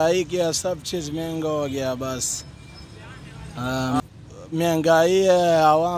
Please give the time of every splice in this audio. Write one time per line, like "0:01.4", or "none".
0:04.0